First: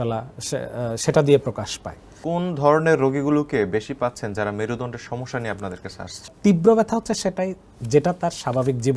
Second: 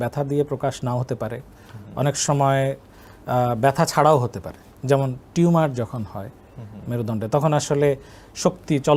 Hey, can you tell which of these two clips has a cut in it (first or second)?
first